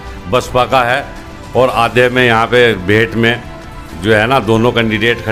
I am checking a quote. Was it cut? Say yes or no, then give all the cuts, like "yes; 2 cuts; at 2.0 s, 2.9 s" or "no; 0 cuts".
no; 0 cuts